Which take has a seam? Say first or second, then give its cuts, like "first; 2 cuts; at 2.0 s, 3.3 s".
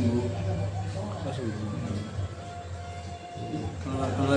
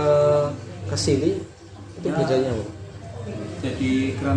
second; 1 cut; at 2.8 s